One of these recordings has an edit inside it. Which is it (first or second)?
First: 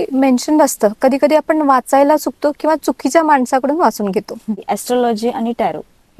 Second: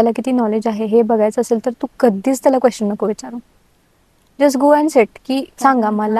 first